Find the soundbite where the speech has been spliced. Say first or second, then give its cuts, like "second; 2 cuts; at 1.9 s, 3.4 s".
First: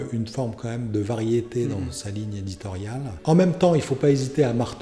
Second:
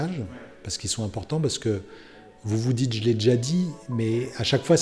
first; 1 cut; at 3.2 s